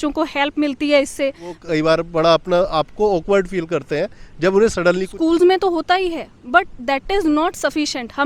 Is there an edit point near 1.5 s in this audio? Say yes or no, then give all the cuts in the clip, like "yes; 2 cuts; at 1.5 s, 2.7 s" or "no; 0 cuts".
yes; 2 cuts; at 1.5 s, 5.1 s